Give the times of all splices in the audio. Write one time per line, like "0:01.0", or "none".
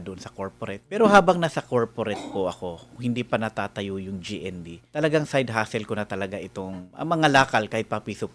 0:01.0
0:04.7
0:06.8